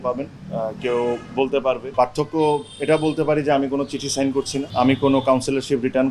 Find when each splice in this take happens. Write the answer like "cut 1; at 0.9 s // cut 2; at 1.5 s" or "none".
cut 1; at 1.9 s // cut 2; at 4.7 s

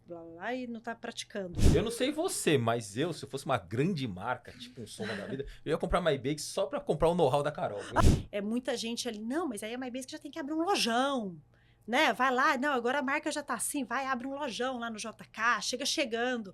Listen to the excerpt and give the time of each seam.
cut 1; at 1.6 s // cut 2; at 8.0 s

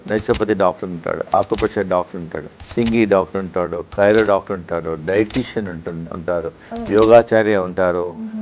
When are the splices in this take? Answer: cut 1; at 2.4 s

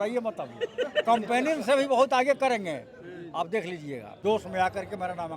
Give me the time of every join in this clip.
cut 1; at 4.1 s

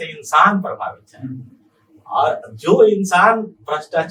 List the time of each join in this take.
none

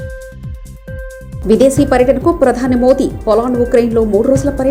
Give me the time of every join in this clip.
none

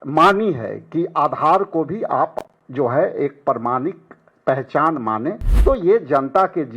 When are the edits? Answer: cut 1; at 5.5 s

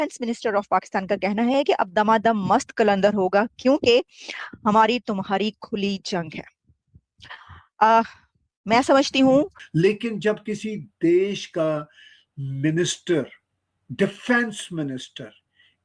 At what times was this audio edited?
cut 1; at 9.6 s

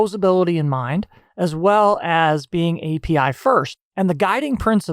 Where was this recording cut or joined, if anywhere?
cut 1; at 3.8 s

